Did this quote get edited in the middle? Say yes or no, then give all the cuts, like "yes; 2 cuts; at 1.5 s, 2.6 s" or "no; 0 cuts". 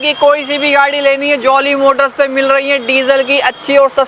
no; 0 cuts